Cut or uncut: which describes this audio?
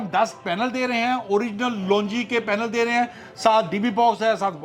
uncut